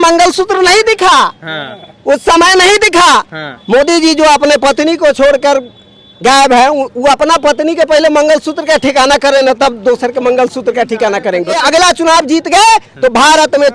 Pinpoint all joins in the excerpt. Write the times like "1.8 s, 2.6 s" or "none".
11.6 s